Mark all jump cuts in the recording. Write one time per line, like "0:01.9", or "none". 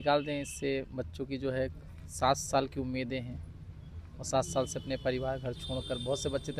none